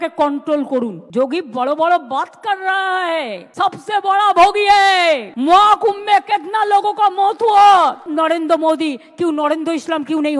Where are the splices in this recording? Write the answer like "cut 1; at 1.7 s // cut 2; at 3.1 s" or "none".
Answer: cut 1; at 1.0 s // cut 2; at 8.1 s